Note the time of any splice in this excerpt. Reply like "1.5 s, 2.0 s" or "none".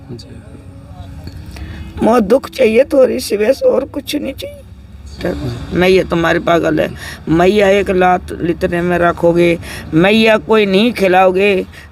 5.2 s